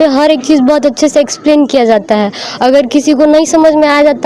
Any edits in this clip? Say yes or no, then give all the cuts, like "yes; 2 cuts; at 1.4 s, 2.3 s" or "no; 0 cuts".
no; 0 cuts